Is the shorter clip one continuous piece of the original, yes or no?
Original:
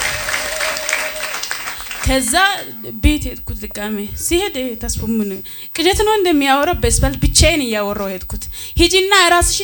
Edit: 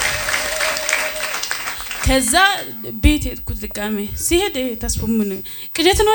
yes